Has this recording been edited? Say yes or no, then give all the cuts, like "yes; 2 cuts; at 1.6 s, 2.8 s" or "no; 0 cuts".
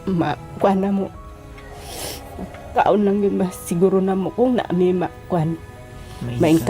yes; 1 cut; at 2.7 s